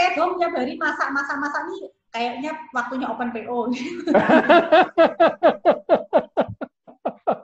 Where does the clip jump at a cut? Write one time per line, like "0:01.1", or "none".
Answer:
none